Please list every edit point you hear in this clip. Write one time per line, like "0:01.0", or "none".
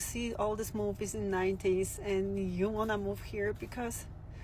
none